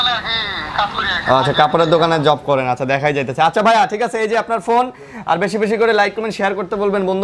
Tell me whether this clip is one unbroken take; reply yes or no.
yes